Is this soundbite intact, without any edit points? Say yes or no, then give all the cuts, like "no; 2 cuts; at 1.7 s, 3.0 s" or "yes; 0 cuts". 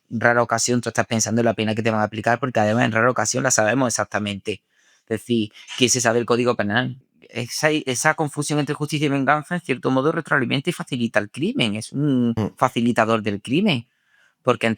no; 1 cut; at 6.9 s